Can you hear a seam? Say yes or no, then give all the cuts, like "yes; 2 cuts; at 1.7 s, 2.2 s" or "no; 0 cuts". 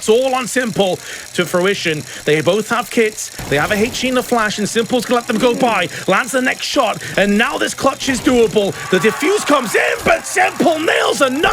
yes; 1 cut; at 1.2 s